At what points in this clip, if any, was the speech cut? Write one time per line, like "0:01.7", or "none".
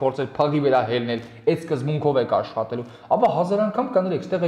none